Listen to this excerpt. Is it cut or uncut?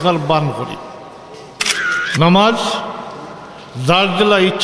cut